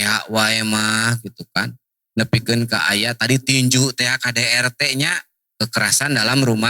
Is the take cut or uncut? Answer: uncut